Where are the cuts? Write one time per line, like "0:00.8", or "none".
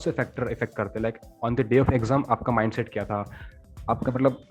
none